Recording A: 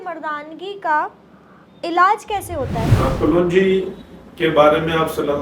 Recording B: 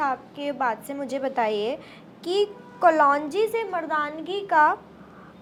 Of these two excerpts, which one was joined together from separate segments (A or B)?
A